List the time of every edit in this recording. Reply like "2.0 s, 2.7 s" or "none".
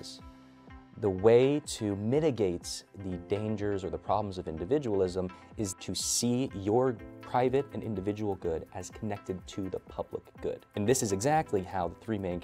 5.7 s, 10.8 s